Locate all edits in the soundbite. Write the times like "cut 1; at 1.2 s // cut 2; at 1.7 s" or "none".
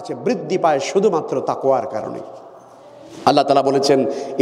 none